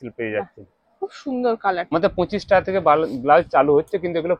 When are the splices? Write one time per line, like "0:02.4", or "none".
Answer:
0:01.9